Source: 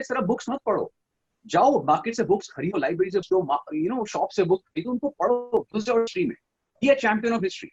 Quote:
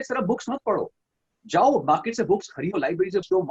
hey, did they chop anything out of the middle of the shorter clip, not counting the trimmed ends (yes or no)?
no